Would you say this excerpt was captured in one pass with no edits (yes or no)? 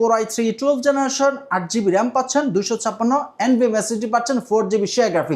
yes